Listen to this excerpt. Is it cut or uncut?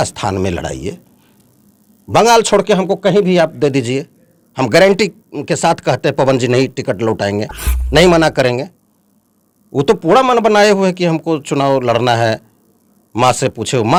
uncut